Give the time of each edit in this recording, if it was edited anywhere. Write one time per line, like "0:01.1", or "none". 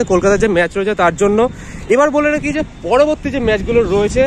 none